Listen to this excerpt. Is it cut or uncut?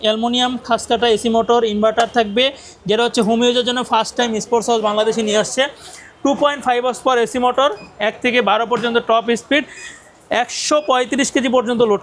uncut